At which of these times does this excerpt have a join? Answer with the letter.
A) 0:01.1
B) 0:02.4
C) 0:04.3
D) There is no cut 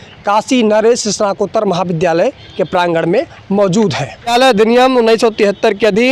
C